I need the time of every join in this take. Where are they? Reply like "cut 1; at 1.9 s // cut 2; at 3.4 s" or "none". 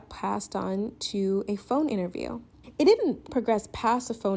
cut 1; at 2.5 s